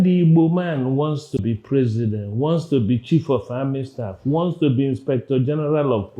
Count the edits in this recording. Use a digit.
1